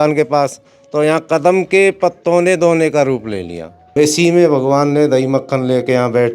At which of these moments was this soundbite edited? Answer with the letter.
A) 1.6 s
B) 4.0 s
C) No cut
B